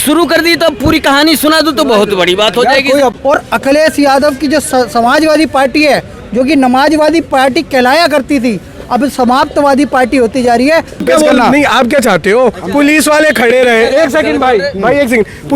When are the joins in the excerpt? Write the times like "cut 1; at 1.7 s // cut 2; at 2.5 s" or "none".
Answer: cut 1; at 3.2 s // cut 2; at 11.0 s

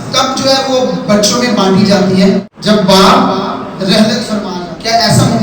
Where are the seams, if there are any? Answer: cut 1; at 2.5 s // cut 2; at 4.5 s

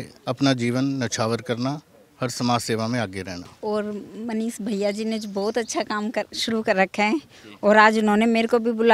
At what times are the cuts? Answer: none

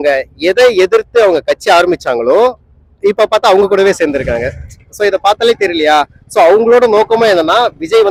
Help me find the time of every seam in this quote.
none

